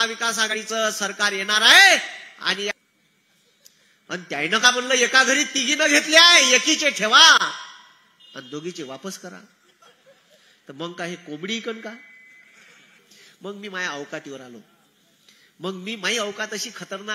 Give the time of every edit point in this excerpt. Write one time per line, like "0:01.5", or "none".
0:02.7
0:12.9